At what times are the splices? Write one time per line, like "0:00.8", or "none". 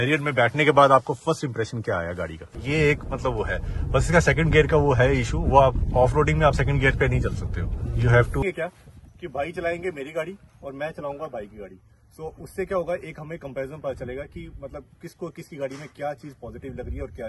0:02.5
0:08.4